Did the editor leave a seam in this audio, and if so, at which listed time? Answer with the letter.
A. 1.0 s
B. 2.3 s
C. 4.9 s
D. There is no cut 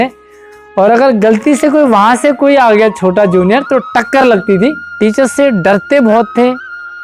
C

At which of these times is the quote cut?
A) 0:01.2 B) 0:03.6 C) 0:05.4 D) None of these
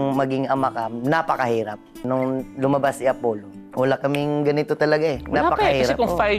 D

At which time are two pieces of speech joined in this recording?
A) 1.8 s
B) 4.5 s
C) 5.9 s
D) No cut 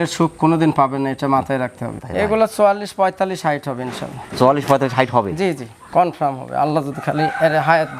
A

